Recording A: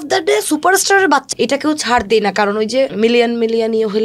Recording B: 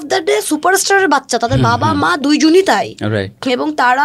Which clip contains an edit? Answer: A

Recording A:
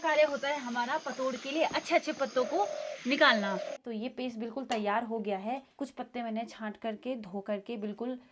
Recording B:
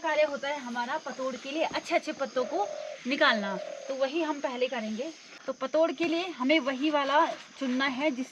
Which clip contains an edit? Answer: A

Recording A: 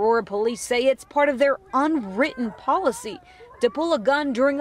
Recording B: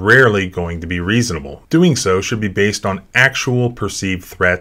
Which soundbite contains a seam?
B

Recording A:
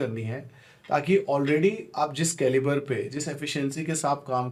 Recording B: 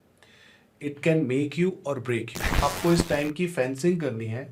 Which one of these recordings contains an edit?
B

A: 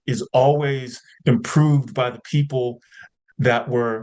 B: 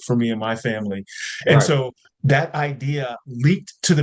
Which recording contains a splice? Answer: B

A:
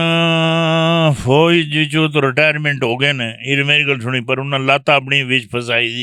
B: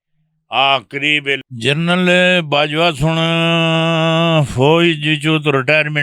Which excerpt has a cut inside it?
B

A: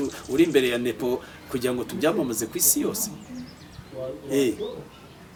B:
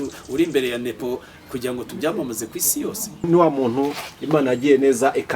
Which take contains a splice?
B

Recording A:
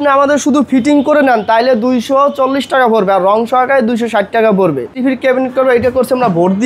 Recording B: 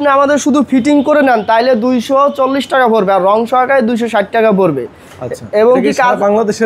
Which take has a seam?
A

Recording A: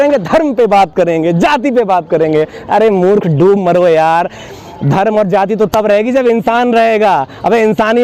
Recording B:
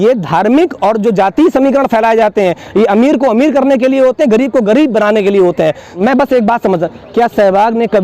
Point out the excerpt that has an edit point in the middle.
B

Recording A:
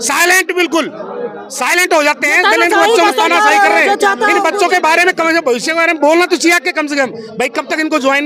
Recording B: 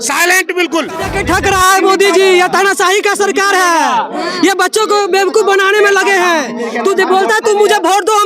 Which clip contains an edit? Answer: B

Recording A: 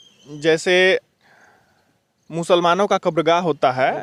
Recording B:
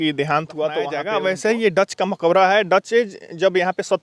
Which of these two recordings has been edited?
B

